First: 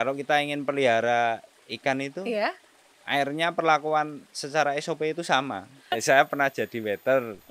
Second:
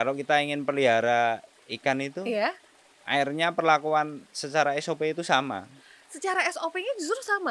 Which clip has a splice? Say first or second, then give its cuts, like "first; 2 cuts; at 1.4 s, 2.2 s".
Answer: first; 1 cut; at 5.8 s